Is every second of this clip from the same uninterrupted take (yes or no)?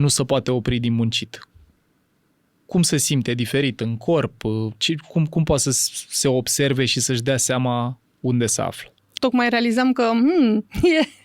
no